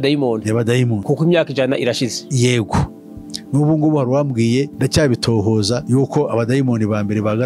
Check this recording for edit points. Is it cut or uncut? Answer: uncut